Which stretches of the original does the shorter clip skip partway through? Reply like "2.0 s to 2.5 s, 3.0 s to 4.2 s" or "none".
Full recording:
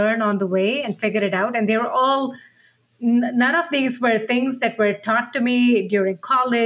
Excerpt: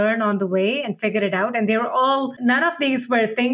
2.4 s to 3.3 s